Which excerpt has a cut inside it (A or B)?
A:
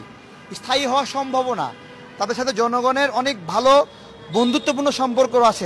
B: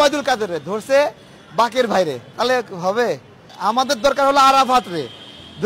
B